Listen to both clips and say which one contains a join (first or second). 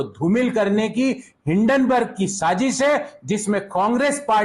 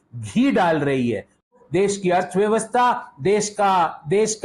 second